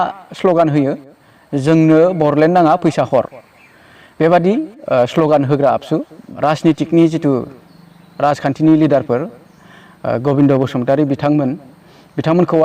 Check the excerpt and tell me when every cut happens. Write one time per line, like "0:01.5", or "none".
0:06.2

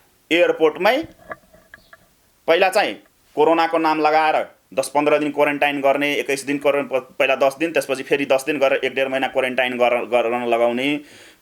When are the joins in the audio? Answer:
none

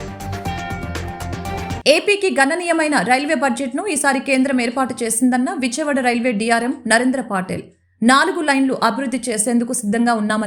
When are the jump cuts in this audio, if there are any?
0:01.6

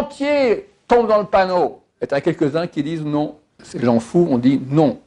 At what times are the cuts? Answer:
0:01.9
0:03.6

